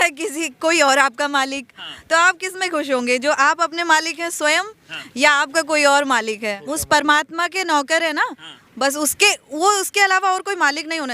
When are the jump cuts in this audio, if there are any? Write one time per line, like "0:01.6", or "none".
0:06.6